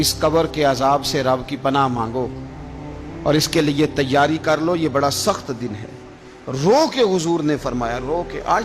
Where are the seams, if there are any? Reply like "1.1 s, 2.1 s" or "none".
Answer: none